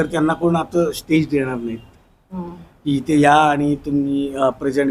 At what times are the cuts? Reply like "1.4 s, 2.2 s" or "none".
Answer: none